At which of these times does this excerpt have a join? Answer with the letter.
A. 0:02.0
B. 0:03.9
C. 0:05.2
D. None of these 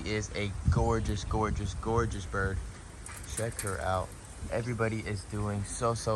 D